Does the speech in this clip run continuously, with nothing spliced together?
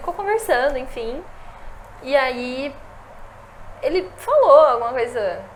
yes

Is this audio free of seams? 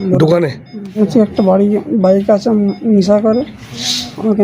no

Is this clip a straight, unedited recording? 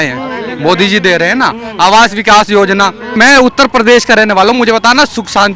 no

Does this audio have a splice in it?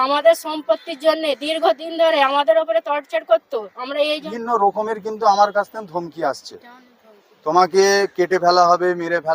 yes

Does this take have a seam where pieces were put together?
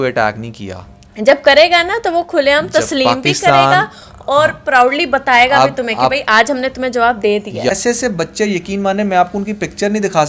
yes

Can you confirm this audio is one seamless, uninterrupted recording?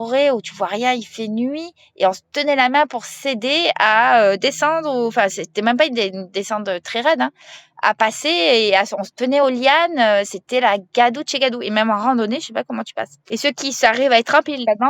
no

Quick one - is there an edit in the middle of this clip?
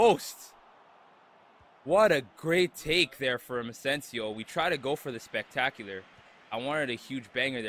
no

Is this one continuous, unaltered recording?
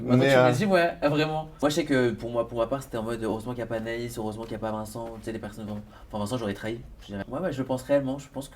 no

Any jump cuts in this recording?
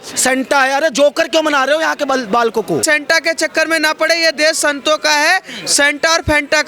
yes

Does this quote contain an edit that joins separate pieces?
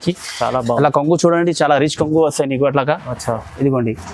no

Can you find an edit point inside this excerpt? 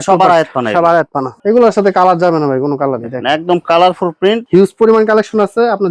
yes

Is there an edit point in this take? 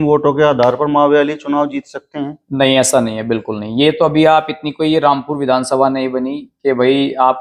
no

